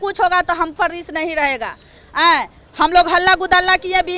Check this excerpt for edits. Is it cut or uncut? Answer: uncut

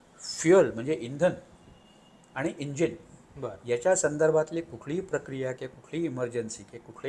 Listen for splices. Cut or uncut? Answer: uncut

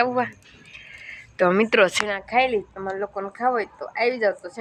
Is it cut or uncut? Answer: uncut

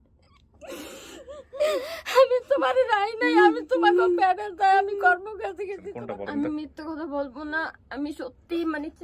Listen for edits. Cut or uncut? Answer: cut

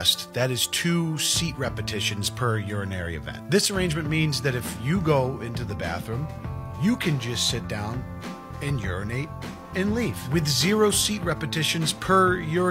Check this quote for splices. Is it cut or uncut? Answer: uncut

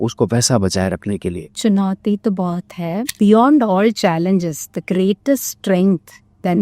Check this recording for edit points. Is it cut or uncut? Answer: cut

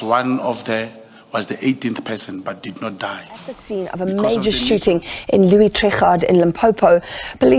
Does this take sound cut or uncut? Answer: cut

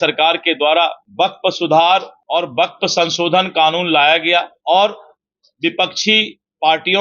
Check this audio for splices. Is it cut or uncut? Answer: cut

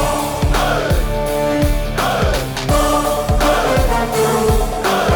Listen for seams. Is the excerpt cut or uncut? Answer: cut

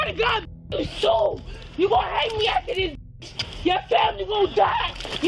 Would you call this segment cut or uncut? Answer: uncut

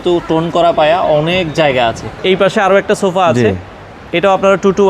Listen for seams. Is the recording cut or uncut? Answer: cut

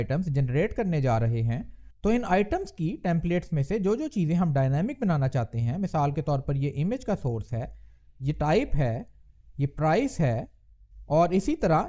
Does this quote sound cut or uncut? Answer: uncut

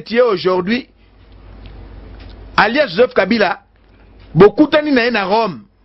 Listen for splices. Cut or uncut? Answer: uncut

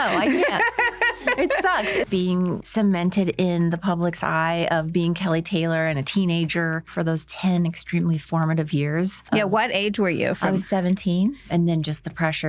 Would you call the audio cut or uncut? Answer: cut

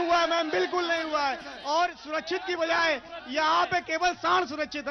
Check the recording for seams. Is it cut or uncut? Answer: uncut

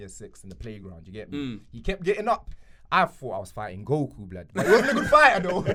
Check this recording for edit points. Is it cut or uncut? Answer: uncut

